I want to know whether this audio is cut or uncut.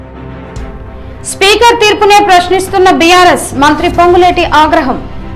cut